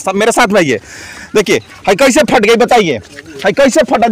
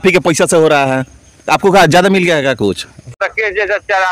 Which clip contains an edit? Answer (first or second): second